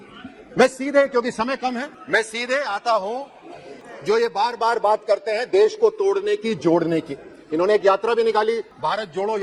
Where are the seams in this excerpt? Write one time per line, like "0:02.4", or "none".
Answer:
none